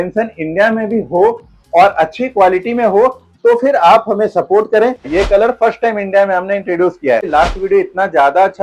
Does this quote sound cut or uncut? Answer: cut